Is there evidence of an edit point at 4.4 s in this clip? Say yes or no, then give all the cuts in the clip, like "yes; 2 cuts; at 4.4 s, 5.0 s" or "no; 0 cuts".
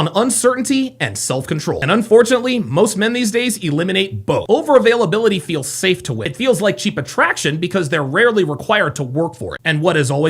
yes; 1 cut; at 4.4 s